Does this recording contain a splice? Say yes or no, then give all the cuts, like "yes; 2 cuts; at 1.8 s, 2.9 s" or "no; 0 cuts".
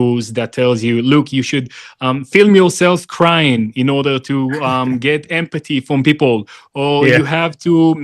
no; 0 cuts